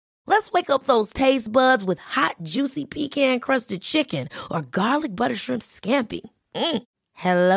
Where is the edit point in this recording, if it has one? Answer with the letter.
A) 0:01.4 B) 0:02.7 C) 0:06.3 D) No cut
D